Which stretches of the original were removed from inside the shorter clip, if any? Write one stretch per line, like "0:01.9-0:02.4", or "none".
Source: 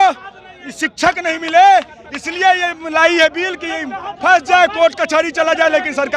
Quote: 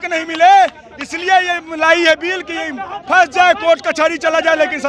none